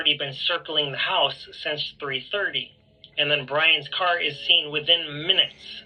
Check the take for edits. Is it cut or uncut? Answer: uncut